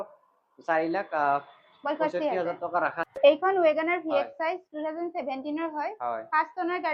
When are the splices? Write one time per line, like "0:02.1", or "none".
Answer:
0:03.1